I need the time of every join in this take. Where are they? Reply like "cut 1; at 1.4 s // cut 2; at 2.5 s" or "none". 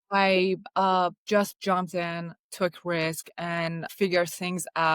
cut 1; at 3.8 s